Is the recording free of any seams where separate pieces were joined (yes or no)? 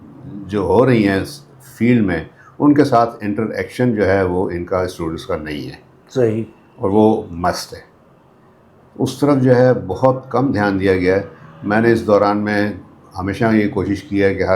yes